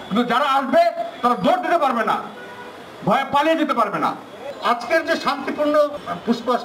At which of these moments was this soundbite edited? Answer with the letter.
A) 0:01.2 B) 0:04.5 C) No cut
B